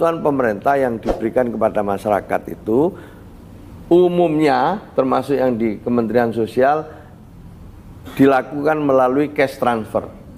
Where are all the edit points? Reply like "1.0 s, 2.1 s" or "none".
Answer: none